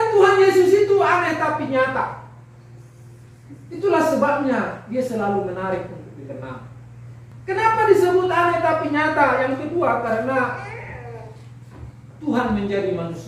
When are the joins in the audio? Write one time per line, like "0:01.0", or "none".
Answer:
0:07.3